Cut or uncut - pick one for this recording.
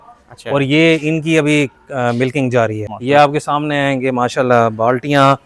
cut